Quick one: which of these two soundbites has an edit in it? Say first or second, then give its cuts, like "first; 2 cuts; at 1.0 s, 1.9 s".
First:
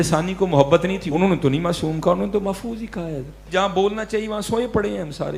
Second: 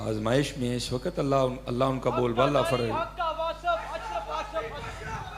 first; 2 cuts; at 1.0 s, 3.4 s